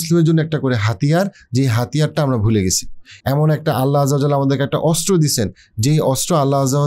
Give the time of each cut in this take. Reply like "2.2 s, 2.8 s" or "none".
none